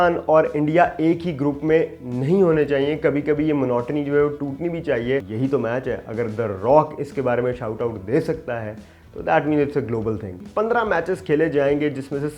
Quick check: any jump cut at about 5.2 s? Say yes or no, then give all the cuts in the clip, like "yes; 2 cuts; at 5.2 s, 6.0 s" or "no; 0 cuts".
yes; 2 cuts; at 5.2 s, 10.4 s